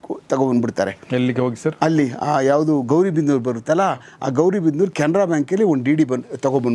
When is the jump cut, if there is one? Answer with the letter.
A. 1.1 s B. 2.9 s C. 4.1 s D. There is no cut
D